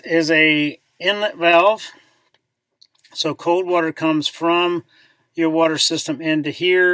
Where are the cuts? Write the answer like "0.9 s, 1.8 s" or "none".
none

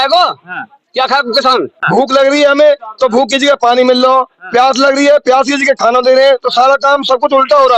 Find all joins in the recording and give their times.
1.8 s

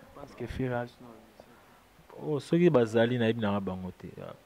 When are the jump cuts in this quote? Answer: none

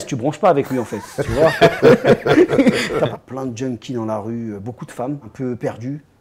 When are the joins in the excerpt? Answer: 3.1 s, 5.3 s

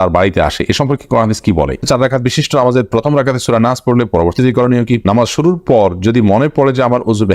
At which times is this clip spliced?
1.8 s, 5.0 s

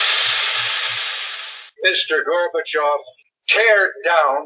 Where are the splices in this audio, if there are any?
1.4 s

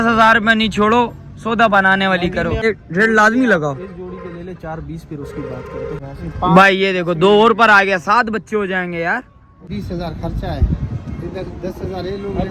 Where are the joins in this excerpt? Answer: 2.6 s, 6.0 s, 9.7 s

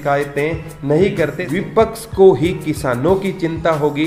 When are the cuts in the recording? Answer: 1.5 s

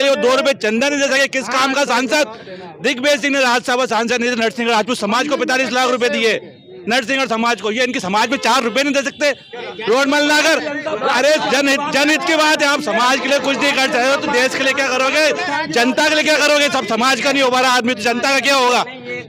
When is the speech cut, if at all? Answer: none

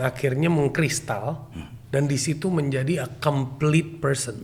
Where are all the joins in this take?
none

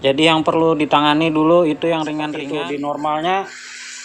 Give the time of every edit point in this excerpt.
2.3 s

